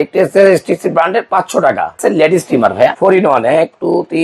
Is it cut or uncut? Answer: cut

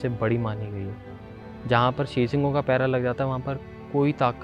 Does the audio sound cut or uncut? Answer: uncut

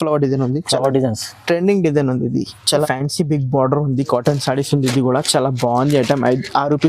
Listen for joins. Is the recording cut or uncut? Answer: cut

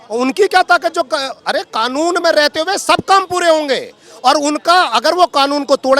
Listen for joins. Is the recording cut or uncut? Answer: uncut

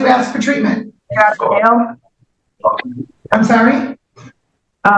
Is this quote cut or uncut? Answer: cut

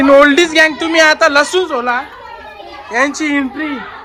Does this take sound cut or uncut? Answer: uncut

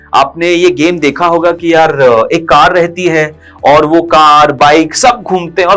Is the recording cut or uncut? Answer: uncut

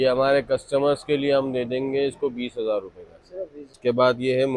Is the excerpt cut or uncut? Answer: cut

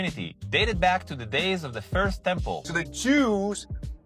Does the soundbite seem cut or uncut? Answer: cut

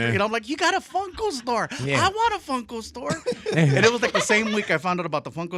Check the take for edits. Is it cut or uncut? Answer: uncut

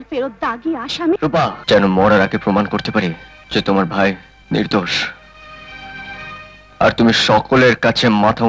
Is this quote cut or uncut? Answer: cut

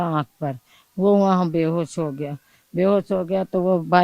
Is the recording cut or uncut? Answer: uncut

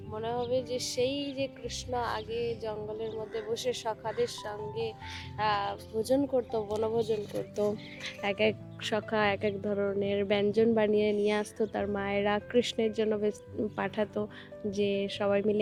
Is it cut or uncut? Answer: uncut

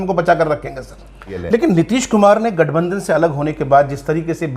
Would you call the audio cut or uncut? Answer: cut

